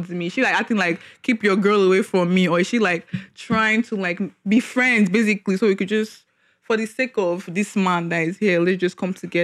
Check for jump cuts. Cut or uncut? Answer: uncut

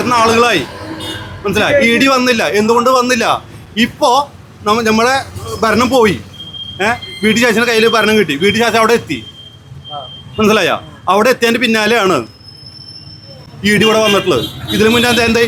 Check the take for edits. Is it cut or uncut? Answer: uncut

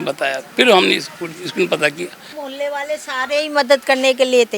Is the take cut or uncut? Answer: cut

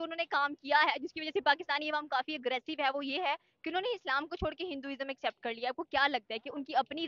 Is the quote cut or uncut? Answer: uncut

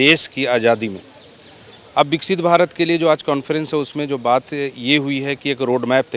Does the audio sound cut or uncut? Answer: uncut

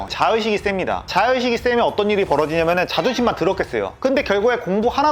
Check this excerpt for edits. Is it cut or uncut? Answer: cut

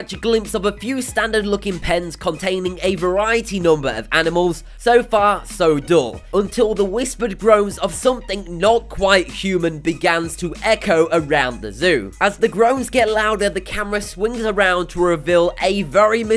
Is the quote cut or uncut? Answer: cut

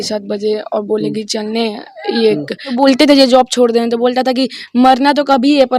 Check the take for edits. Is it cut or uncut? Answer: cut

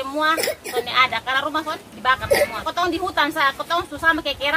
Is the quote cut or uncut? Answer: cut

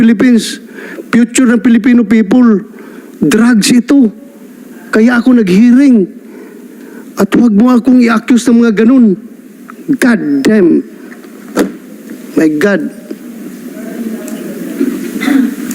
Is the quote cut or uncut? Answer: uncut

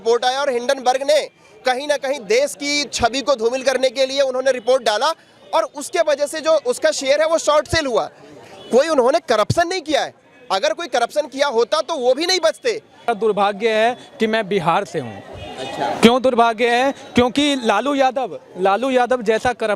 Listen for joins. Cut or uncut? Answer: cut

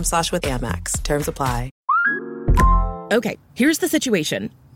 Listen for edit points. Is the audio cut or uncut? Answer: cut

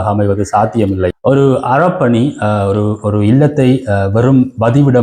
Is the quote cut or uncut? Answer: cut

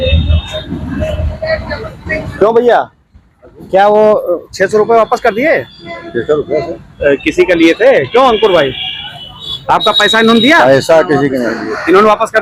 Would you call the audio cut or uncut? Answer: uncut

